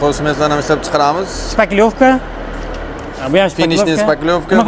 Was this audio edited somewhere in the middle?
no; 0 cuts

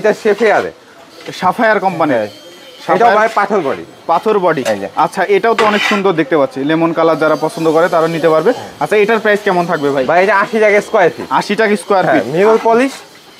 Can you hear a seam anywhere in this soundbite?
no; 0 cuts

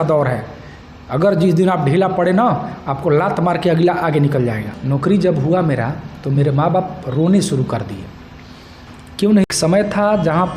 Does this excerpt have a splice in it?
yes; 2 cuts; at 4.7 s, 9.4 s

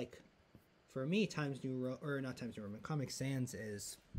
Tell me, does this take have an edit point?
no; 0 cuts

